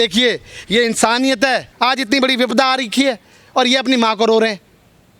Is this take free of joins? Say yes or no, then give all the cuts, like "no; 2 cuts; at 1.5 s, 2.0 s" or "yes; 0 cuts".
no; 1 cut; at 1.7 s